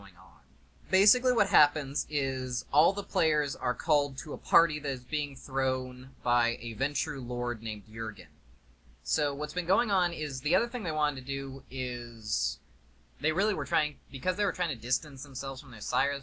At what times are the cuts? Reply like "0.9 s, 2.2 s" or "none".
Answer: none